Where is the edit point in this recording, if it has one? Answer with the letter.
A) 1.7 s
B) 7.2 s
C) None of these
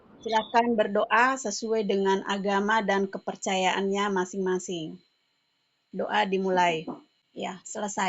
B